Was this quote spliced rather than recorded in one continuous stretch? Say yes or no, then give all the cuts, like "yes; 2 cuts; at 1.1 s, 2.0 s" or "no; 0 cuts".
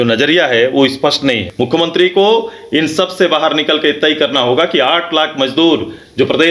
yes; 1 cut; at 1.5 s